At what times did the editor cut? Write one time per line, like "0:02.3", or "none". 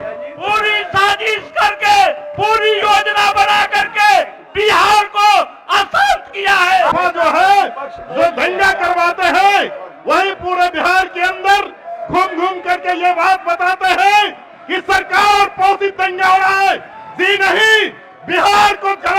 0:06.9